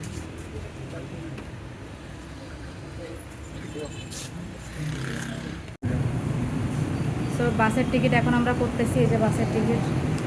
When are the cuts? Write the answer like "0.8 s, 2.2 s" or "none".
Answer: 5.7 s